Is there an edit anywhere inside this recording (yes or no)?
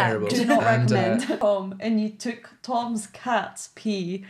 yes